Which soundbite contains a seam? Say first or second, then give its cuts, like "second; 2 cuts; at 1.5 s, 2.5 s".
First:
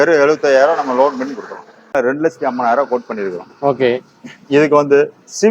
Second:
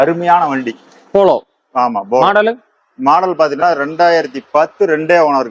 first; 1 cut; at 1.9 s